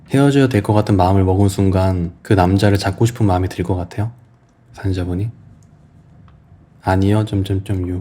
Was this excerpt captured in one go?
no; 1 cut; at 2.1 s

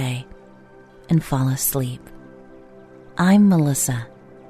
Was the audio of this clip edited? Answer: no; 0 cuts

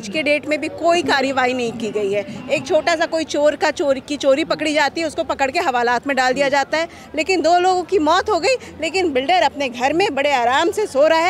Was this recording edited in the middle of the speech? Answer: no; 0 cuts

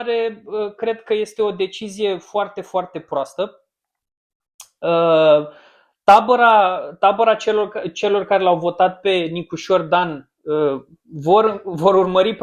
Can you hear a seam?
no; 0 cuts

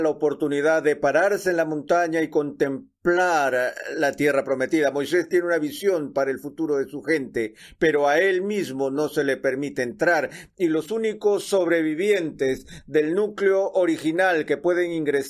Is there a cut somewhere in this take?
no; 0 cuts

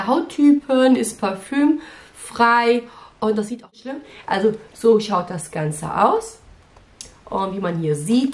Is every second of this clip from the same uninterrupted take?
no; 1 cut; at 3.8 s

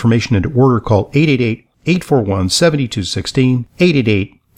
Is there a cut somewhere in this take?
no; 0 cuts

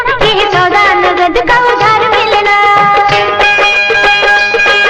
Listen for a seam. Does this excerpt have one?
no; 0 cuts

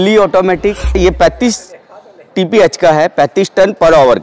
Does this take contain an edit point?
yes; 1 cut; at 1.0 s

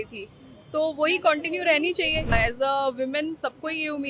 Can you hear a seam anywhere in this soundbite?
yes; 1 cut; at 2.3 s

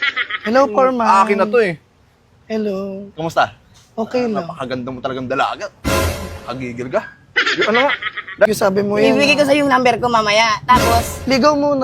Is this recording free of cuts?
no; 1 cut; at 8.5 s

